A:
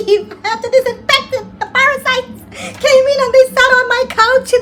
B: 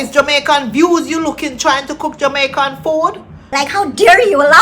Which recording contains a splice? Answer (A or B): B